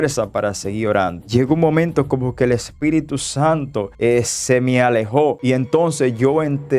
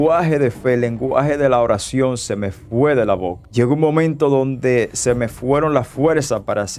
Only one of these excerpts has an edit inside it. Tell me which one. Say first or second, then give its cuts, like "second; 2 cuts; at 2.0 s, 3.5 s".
first; 1 cut; at 5.4 s